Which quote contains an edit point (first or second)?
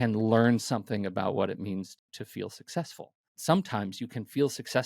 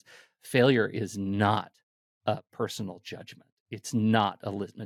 first